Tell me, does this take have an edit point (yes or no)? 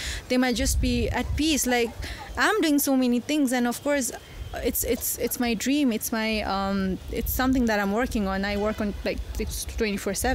no